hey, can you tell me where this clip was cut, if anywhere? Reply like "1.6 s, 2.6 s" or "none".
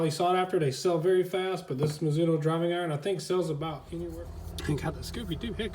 4.0 s